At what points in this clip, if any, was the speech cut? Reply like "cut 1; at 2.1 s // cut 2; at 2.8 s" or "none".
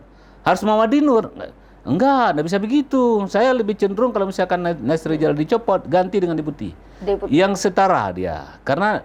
none